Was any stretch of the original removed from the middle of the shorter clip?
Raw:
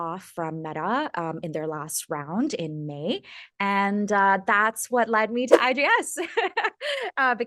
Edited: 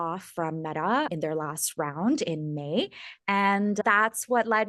yes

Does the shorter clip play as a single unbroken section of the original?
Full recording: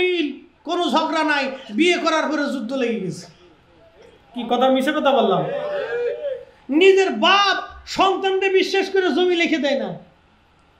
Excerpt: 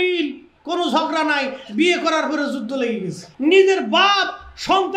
no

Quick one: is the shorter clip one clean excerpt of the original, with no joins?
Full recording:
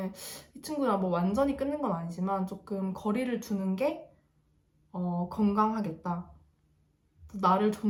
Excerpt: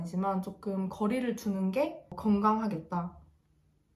no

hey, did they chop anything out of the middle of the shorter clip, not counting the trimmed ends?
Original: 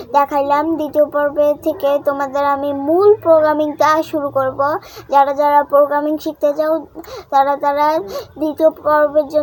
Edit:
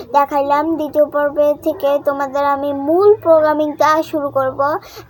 no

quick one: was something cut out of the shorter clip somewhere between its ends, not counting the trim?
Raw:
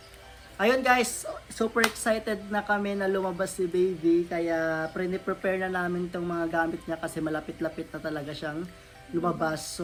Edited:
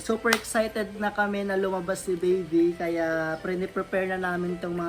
no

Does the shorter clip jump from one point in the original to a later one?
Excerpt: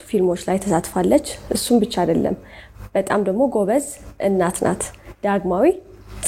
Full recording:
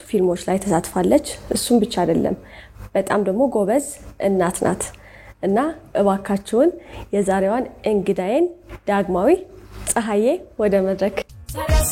yes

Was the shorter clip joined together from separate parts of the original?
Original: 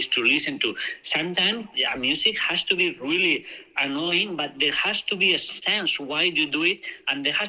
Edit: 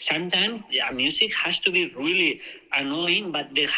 no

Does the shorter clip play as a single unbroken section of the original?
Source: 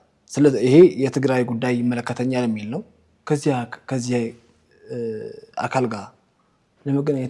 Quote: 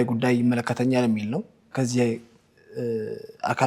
no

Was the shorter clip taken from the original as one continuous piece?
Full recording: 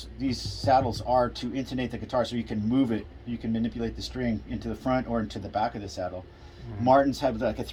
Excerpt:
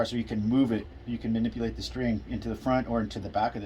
yes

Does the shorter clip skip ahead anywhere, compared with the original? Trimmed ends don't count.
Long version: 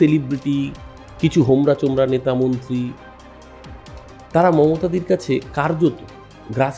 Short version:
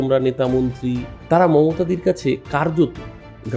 yes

